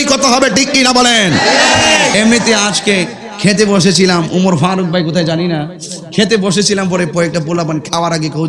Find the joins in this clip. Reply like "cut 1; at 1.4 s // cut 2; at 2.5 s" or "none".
cut 1; at 2.1 s